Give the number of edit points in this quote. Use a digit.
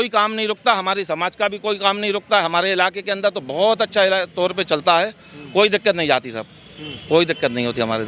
0